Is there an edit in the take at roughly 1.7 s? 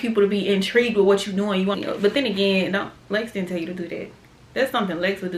yes; 1 cut; at 1.7 s

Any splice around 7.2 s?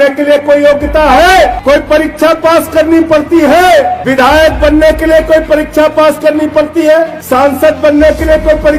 yes; 3 cuts; at 1.6 s, 4.0 s, 7.2 s

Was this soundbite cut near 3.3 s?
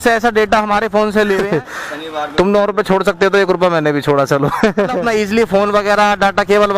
no; 2 cuts; at 1.5 s, 5.0 s

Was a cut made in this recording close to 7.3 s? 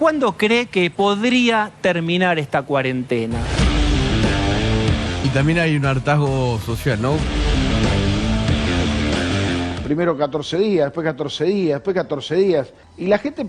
yes; 3 cuts; at 5.2 s, 7.3 s, 9.8 s

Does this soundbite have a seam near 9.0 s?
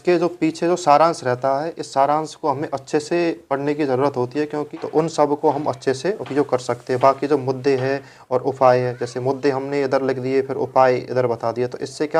no; 1 cut; at 4.6 s

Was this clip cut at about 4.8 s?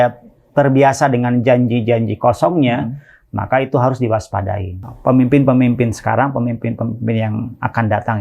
yes; 1 cut; at 4.8 s

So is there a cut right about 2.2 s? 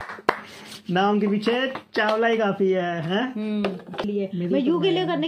no; 1 cut; at 4.1 s

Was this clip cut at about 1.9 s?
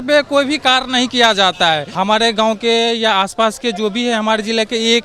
yes; 1 cut; at 1.9 s

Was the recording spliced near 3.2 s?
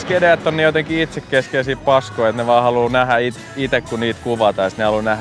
no; 0 cuts

